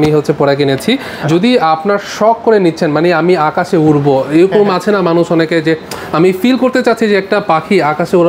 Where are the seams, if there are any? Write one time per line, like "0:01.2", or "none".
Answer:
0:01.1